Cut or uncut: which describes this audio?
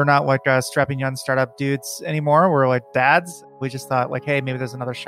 cut